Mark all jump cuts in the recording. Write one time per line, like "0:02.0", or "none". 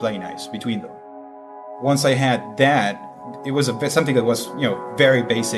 0:01.5